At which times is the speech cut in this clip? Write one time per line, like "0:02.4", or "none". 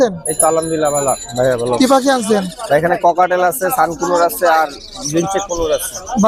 none